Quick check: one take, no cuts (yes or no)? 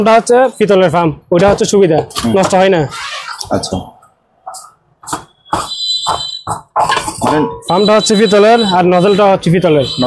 yes